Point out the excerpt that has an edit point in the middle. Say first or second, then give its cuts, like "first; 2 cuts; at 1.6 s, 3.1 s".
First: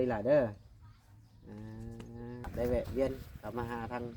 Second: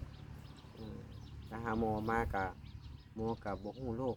first; 1 cut; at 2.5 s